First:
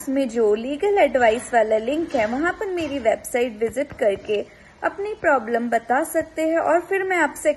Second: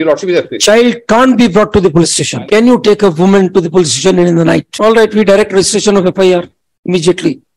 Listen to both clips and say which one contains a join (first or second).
second